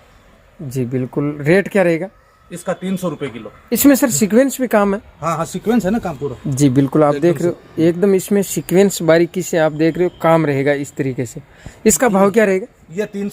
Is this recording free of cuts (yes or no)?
no